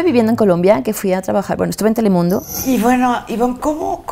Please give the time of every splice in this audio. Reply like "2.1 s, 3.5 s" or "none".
2.5 s